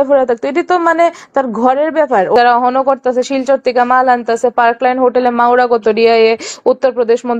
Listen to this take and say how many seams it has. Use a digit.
1